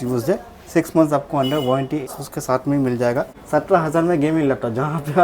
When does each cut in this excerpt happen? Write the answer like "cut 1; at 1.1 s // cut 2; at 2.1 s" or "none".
cut 1; at 2.1 s // cut 2; at 3.4 s

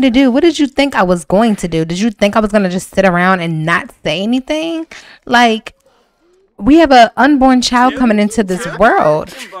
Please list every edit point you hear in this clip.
none

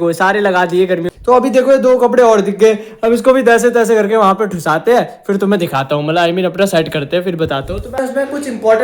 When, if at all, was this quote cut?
cut 1; at 1.1 s // cut 2; at 8.0 s

